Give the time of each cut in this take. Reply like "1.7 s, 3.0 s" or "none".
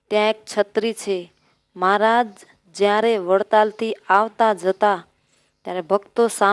1.7 s